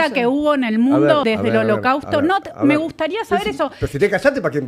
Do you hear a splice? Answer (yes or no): yes